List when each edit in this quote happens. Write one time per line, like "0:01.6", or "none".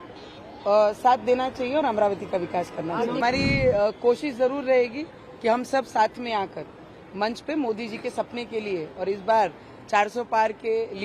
0:03.2